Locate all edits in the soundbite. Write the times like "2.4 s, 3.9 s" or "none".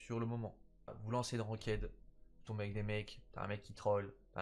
1.0 s